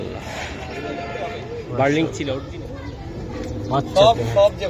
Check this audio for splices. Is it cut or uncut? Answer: cut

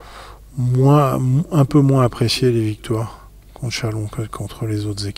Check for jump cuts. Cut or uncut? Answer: uncut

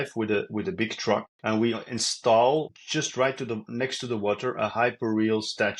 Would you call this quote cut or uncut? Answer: cut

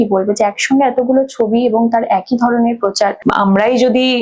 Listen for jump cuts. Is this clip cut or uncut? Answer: cut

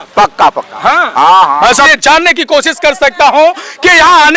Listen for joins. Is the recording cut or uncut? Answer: cut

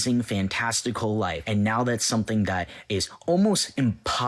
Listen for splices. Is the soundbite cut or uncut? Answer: cut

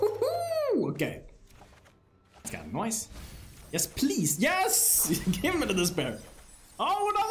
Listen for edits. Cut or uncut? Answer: cut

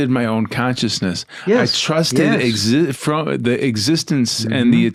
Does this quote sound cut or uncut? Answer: uncut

